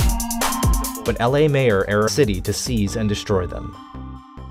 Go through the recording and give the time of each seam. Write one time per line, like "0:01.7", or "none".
none